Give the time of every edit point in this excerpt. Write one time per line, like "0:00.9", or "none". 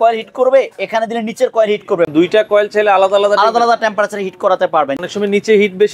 0:02.1
0:04.9